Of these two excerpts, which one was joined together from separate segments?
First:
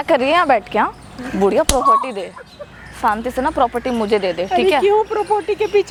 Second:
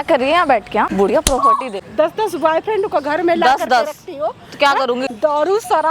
second; 3 cuts; at 0.9 s, 1.8 s, 5.1 s

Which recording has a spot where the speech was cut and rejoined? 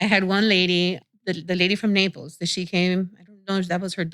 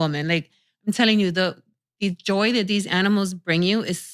first; 1 cut; at 1.0 s

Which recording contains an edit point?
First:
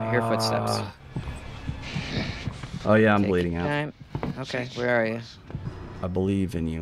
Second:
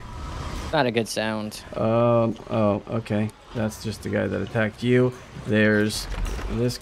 first; 1 cut; at 5.5 s

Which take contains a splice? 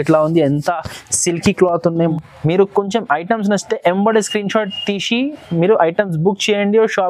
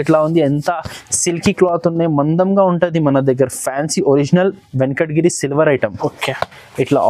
first; 1 cut; at 2.1 s

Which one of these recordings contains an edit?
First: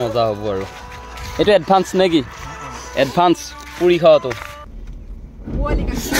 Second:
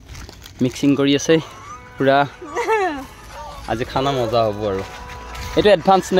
first; 1 cut; at 4.5 s

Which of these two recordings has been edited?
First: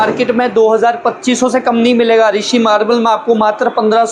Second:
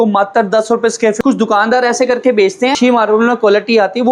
second; 2 cuts; at 1.2 s, 2.8 s

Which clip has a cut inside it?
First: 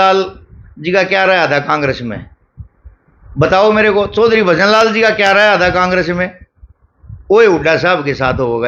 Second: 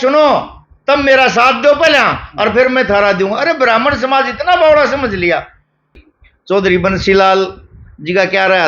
second; 1 cut; at 6.0 s

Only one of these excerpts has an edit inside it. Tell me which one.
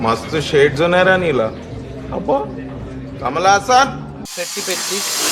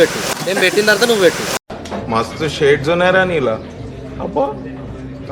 first; 1 cut; at 4.2 s

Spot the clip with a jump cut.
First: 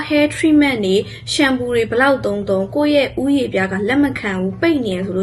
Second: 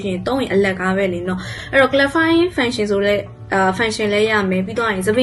second; 1 cut; at 1.6 s

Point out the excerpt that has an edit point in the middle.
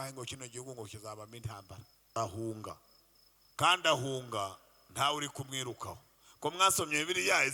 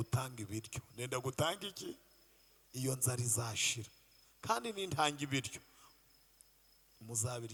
first; 1 cut; at 2.1 s

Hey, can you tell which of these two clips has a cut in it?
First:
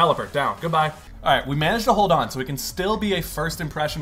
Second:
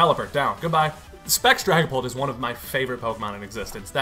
first; 1 cut; at 1.1 s

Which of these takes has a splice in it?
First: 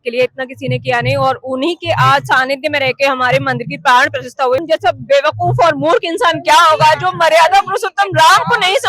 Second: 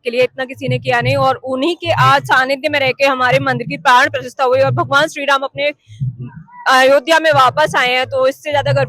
first; 1 cut; at 4.6 s

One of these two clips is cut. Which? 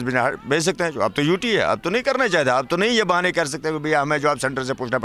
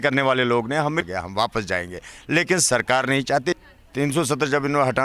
second; 2 cuts; at 1.1 s, 3.6 s

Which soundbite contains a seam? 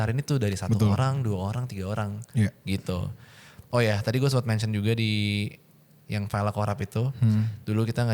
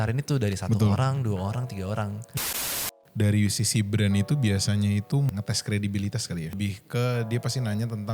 second; 3 cuts; at 2.5 s, 5.3 s, 6.5 s

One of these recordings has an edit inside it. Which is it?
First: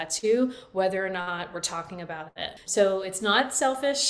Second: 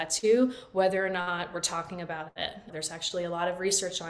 first; 1 cut; at 2.6 s

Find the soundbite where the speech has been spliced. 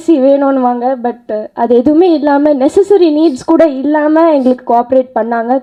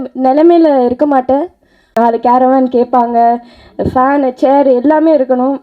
second; 1 cut; at 1.9 s

